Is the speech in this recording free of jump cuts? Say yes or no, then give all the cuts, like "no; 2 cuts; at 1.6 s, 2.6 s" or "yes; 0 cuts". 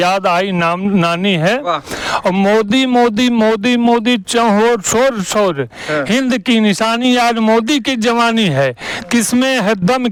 yes; 0 cuts